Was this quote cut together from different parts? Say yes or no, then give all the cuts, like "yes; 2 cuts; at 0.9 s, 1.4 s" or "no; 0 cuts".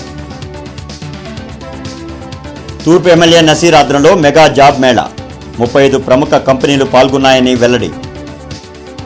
no; 0 cuts